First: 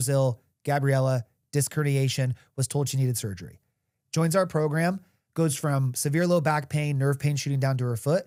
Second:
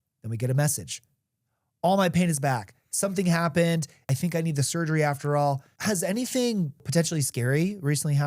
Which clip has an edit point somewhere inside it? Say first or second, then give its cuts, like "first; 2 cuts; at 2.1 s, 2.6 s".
second; 3 cuts; at 4.1 s, 5.7 s, 6.9 s